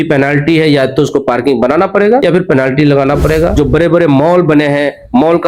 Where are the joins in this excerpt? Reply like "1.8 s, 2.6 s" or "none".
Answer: 3.5 s